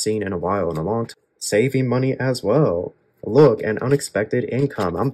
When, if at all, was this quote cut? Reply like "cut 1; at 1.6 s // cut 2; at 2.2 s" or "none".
cut 1; at 1.1 s